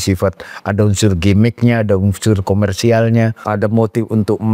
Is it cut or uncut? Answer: cut